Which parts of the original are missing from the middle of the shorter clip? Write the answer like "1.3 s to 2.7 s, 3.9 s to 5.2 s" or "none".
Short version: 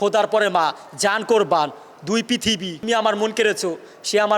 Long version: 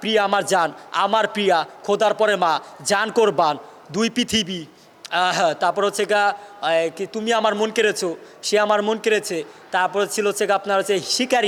4.6 s to 7.2 s